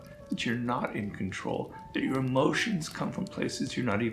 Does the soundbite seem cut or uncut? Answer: uncut